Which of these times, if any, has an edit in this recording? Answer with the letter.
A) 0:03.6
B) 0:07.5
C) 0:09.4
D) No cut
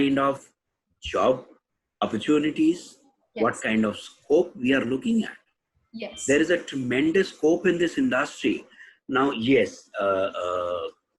D